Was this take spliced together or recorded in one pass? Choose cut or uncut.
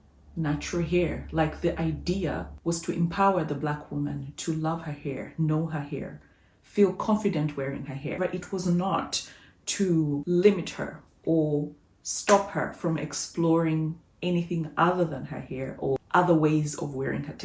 cut